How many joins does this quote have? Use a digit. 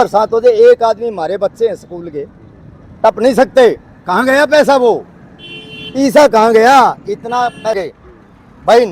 1